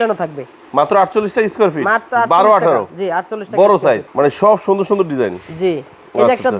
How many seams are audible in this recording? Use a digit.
1